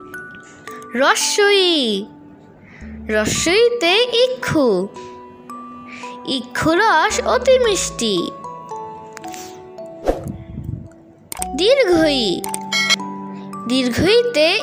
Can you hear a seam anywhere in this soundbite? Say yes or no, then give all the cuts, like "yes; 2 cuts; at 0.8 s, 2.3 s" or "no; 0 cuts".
yes; 1 cut; at 0.9 s